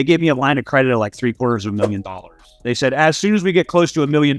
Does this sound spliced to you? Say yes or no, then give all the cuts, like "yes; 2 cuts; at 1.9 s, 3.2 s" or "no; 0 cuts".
no; 0 cuts